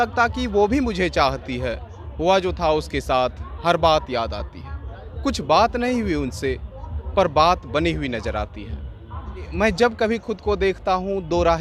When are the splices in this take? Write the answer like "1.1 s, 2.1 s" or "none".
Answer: 9.5 s